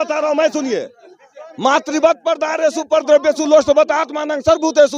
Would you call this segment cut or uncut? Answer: uncut